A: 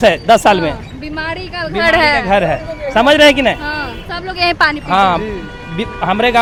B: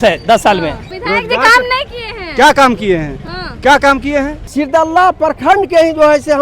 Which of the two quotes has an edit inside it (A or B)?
B